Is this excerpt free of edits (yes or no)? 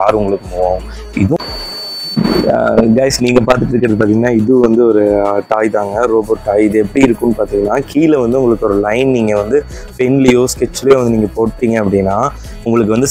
no